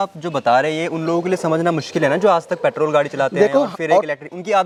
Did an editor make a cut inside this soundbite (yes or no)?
no